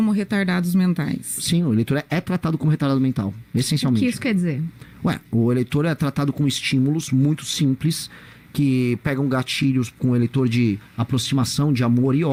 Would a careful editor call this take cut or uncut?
uncut